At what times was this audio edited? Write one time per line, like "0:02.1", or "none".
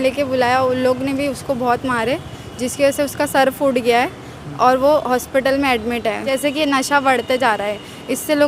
0:06.2